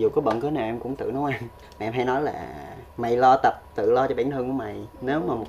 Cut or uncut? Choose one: cut